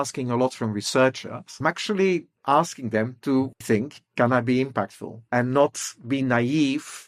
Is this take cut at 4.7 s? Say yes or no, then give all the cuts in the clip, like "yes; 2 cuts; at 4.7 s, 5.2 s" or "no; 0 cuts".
no; 1 cut; at 1.5 s